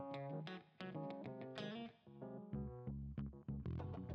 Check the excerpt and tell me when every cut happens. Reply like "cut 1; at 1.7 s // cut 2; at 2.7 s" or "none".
none